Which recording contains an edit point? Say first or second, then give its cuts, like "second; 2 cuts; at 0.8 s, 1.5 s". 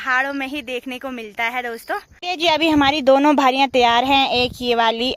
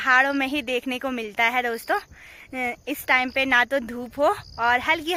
first; 1 cut; at 2.2 s